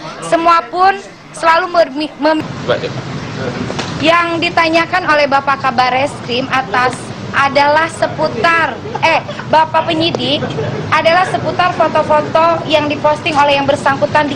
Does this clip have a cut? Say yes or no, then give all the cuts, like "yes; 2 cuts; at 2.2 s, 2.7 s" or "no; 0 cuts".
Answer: yes; 1 cut; at 2.4 s